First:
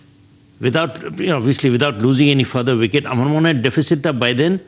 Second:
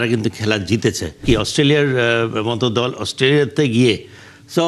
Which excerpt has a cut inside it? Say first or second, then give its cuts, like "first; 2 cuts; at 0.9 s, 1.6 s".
second; 1 cut; at 1.2 s